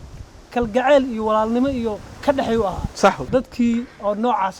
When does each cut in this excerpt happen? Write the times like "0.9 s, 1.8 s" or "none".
3.3 s